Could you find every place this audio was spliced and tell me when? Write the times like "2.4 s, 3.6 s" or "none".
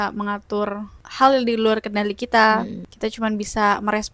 1.0 s, 2.8 s